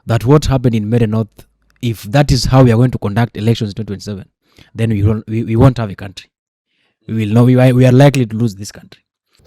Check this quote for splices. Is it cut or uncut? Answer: uncut